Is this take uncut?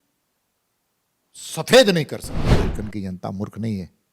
no; 1 cut; at 2.5 s

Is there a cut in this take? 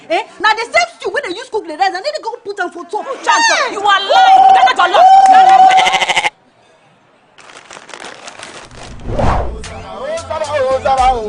yes; 2 cuts; at 4.4 s, 8.7 s

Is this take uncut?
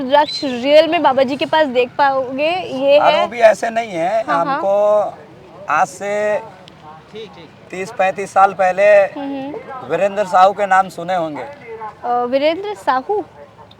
yes; 0 cuts

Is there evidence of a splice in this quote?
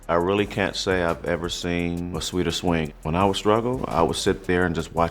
yes; 1 cut; at 2.9 s

